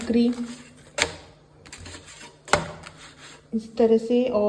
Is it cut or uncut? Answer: uncut